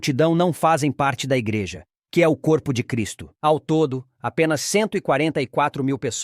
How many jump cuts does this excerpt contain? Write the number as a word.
zero